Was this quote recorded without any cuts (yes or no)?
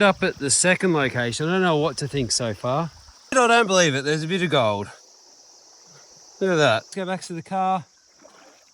no